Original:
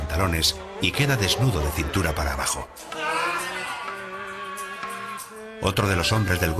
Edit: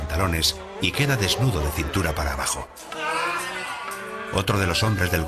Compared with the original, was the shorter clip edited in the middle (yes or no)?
yes